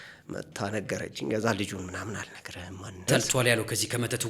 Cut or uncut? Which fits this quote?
cut